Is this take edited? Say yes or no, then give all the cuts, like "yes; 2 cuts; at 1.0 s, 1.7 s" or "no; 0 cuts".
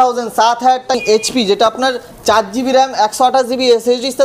yes; 1 cut; at 1.0 s